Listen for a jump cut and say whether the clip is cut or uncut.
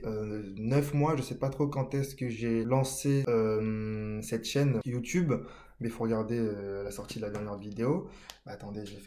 cut